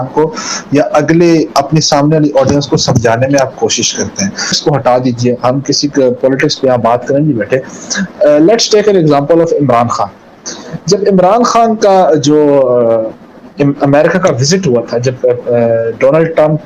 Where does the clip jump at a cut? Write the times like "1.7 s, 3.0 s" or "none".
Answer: 4.6 s